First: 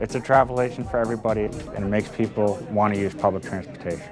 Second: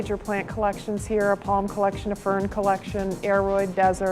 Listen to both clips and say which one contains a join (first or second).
first